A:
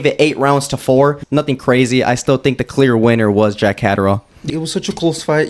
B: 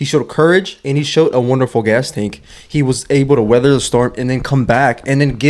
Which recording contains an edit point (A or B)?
A